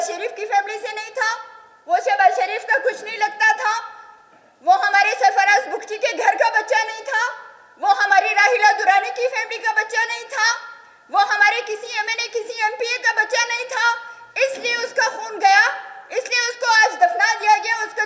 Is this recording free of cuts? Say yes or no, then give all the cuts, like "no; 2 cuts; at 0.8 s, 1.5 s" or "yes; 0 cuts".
yes; 0 cuts